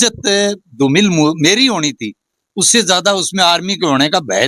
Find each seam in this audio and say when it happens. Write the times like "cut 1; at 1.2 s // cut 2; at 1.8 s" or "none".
none